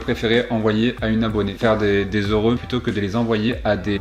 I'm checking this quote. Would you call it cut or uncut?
uncut